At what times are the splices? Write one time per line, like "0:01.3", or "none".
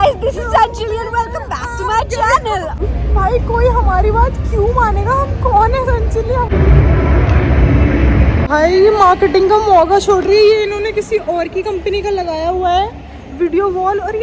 0:02.8
0:06.5
0:08.5